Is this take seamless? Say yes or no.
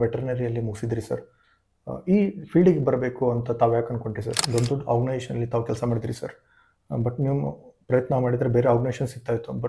no